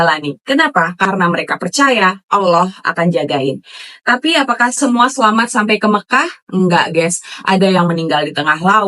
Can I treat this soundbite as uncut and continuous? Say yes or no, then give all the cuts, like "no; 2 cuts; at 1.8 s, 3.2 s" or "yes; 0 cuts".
yes; 0 cuts